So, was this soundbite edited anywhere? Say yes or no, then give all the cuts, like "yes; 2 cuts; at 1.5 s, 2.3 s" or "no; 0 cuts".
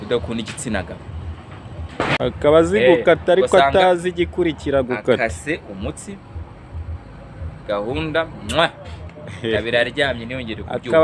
yes; 1 cut; at 2.2 s